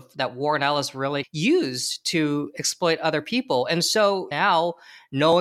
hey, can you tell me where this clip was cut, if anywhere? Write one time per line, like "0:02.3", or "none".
0:01.3
0:04.3